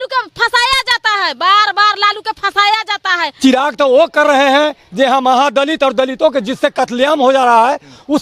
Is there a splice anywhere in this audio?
yes; 1 cut; at 3.3 s

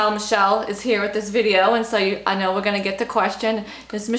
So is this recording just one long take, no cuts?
yes; 0 cuts

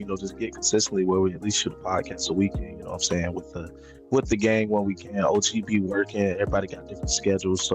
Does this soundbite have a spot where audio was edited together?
no; 0 cuts

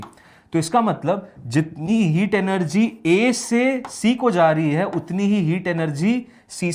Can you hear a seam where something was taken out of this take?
no; 0 cuts

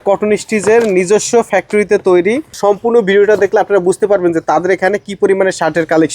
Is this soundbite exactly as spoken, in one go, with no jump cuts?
no; 1 cut; at 2.5 s

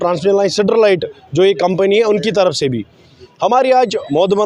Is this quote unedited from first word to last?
yes; 0 cuts

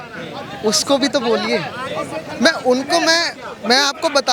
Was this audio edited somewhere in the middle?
no; 0 cuts

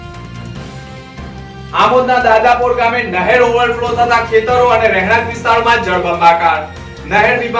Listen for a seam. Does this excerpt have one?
yes; 1 cut; at 1.2 s

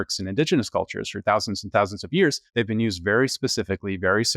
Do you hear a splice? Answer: yes; 1 cut; at 2.4 s

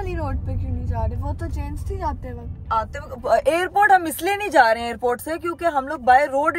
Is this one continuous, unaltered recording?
yes; 0 cuts

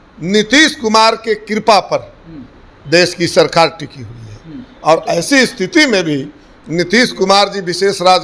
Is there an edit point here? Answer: no; 0 cuts

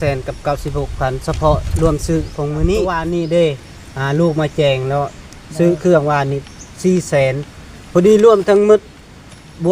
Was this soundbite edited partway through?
yes; 1 cut; at 3.0 s

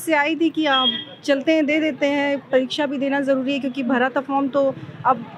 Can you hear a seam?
no; 0 cuts

